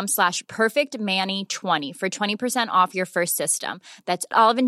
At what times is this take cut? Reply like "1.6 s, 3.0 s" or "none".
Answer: 1.8 s